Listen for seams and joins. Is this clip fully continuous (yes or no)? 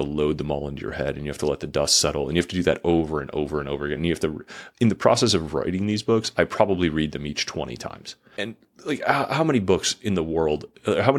yes